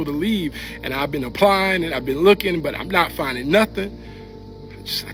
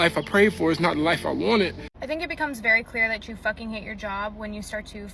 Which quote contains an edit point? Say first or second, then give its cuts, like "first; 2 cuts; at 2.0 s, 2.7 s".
second; 1 cut; at 1.9 s